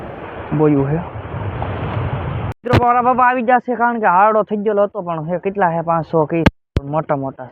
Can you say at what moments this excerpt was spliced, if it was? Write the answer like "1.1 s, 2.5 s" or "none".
2.6 s